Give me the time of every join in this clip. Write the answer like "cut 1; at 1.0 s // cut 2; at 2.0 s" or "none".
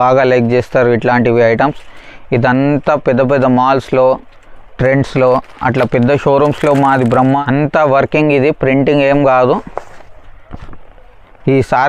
cut 1; at 7.2 s